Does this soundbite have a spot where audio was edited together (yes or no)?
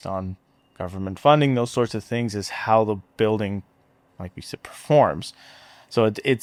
no